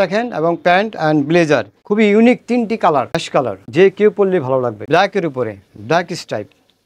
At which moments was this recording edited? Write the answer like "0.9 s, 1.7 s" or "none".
1.7 s, 3.7 s, 4.8 s